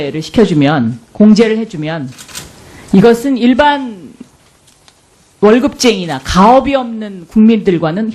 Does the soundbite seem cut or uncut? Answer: cut